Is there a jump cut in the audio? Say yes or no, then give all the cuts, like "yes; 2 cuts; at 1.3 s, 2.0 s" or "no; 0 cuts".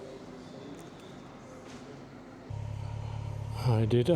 yes; 1 cut; at 2.5 s